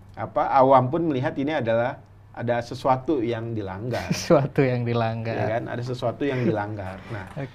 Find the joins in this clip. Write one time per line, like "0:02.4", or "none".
none